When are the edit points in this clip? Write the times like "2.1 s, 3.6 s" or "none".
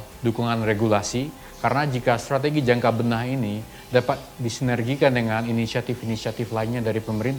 none